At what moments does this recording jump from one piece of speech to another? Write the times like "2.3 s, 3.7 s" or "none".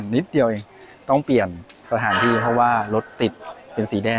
none